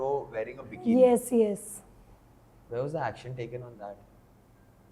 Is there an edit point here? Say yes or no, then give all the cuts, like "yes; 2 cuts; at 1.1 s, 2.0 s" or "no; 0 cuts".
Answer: no; 0 cuts